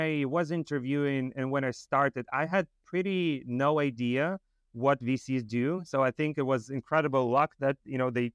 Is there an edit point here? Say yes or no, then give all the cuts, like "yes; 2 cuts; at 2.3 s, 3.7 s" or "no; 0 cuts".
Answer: no; 0 cuts